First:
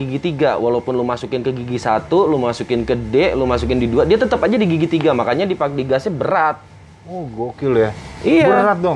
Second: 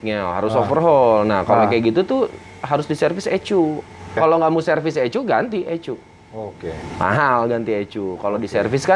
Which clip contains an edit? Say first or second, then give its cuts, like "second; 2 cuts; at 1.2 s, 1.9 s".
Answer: second; 1 cut; at 4.2 s